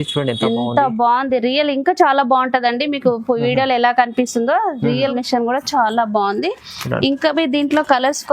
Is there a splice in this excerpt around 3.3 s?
no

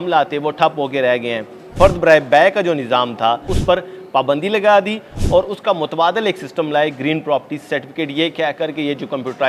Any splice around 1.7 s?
yes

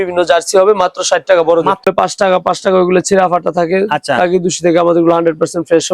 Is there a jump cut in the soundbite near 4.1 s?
no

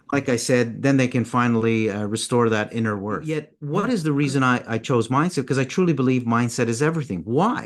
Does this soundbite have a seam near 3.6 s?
yes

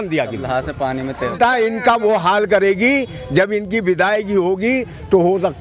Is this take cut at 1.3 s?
yes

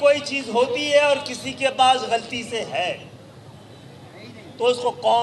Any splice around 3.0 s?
no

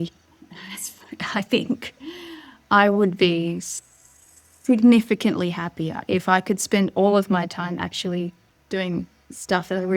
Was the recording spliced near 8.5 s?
yes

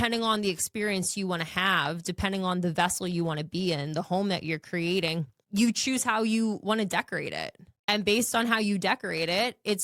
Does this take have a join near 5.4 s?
yes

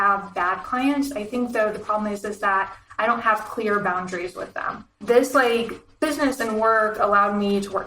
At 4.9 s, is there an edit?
yes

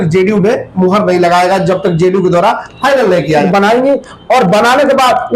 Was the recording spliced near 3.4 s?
yes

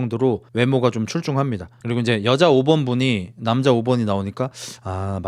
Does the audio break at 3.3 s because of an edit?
no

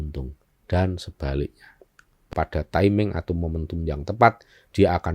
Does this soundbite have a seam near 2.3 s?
yes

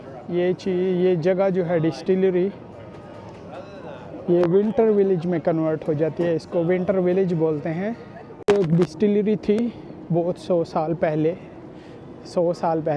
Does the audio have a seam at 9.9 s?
no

